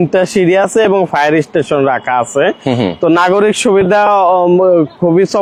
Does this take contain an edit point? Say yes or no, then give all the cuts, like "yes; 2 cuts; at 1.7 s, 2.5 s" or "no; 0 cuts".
no; 0 cuts